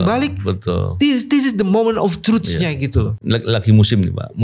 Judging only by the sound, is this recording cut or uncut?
cut